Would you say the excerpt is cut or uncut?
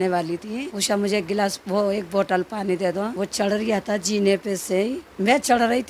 uncut